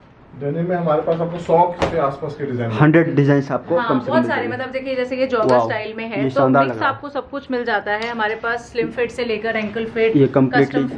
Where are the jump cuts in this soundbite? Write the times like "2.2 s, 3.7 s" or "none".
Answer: none